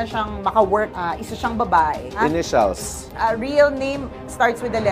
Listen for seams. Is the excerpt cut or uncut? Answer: cut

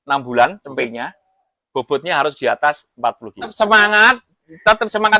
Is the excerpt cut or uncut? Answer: cut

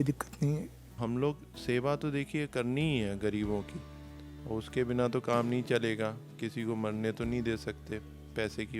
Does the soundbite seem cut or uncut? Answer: cut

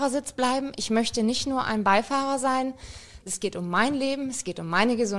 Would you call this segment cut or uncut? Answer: cut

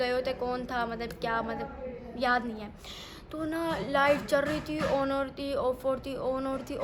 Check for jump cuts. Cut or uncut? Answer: uncut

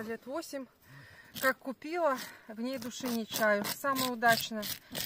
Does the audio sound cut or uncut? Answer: uncut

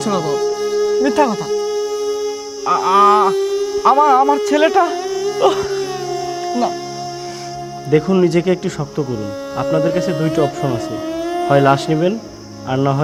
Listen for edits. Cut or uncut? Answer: uncut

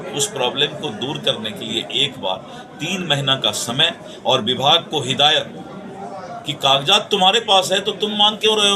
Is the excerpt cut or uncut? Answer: uncut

